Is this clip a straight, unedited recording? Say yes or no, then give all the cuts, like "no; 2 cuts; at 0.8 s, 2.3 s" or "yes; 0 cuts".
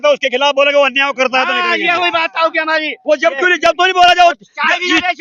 yes; 0 cuts